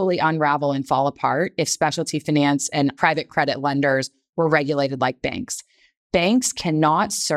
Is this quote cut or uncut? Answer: cut